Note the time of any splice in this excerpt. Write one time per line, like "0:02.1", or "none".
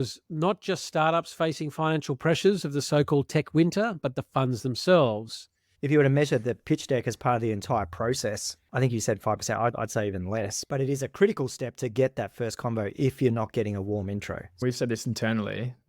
0:05.7
0:14.5